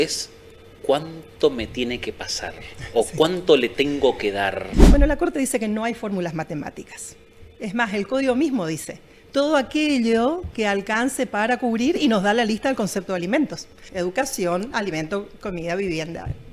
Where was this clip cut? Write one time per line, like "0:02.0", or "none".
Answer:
0:04.7
0:13.8